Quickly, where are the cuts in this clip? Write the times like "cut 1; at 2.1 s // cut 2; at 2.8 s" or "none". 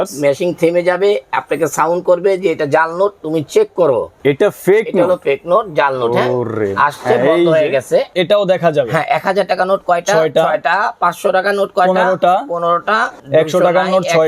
cut 1; at 4.1 s // cut 2; at 8.1 s // cut 3; at 13.2 s

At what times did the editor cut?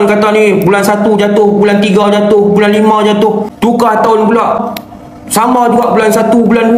cut 1; at 3.5 s // cut 2; at 4.6 s

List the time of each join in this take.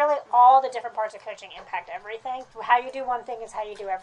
cut 1; at 2.5 s

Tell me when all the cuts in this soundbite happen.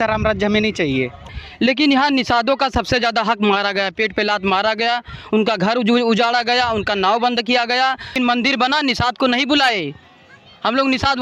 cut 1; at 1.4 s // cut 2; at 8.1 s

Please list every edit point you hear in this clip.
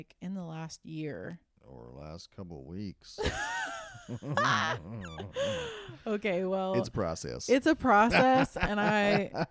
none

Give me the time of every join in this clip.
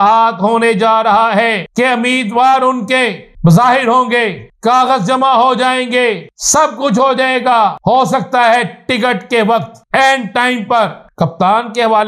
cut 1; at 1.6 s // cut 2; at 3.2 s // cut 3; at 4.4 s // cut 4; at 6.3 s // cut 5; at 7.8 s // cut 6; at 9.8 s // cut 7; at 11.0 s

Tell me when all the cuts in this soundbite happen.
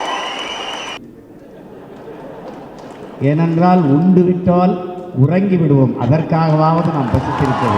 cut 1; at 1.0 s

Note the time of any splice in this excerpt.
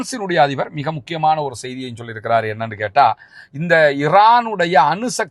none

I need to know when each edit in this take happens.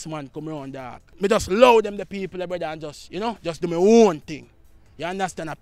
cut 1; at 1.0 s

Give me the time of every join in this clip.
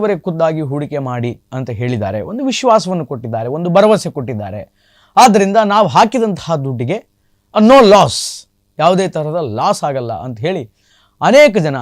none

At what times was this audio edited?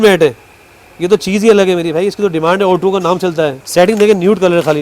cut 1; at 3.6 s

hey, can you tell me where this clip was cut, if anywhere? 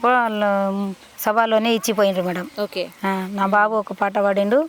none

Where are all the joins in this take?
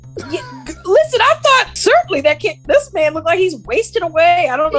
cut 1; at 1.7 s

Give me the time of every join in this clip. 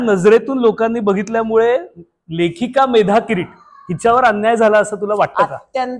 none

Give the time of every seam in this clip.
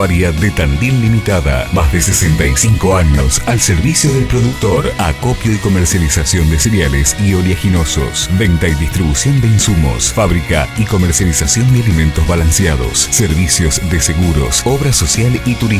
none

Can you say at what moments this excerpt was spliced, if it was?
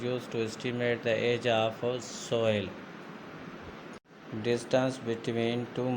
cut 1; at 4.0 s

